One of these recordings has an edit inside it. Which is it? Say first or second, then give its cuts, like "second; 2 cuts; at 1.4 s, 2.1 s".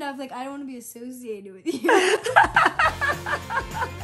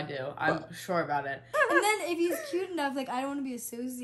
second; 1 cut; at 1.5 s